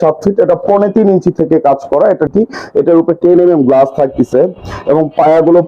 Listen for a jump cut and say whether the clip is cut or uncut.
cut